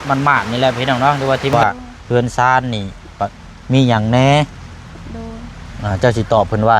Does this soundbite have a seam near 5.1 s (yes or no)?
no